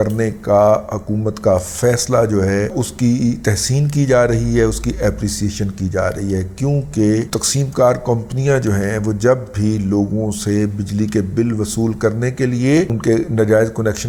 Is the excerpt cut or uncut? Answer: uncut